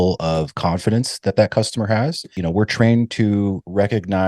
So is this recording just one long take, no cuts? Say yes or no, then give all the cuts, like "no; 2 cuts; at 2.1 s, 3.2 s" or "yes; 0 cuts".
no; 1 cut; at 2.3 s